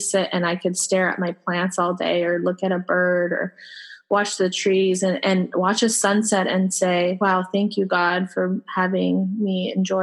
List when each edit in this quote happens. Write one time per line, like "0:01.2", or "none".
none